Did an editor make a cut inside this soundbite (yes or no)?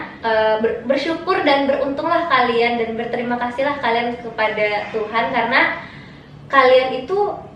no